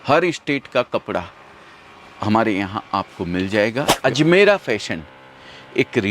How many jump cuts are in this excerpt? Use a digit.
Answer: 1